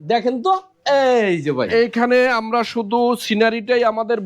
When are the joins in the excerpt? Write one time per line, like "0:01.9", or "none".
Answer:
0:01.7